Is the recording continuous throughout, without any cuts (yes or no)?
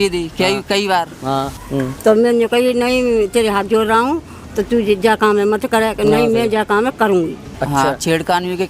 no